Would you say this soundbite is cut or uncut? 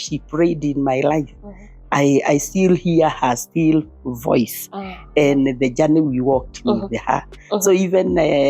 uncut